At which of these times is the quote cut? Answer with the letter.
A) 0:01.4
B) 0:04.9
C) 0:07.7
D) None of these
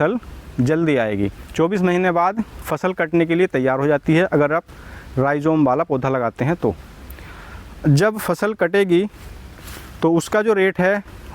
A